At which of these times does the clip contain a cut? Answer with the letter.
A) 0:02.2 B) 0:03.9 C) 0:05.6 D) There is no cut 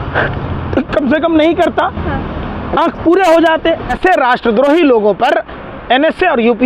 B